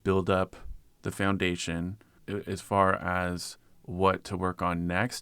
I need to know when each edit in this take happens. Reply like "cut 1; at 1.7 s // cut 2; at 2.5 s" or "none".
cut 1; at 2.1 s